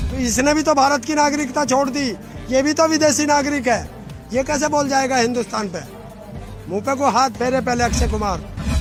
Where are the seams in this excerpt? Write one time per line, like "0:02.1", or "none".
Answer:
none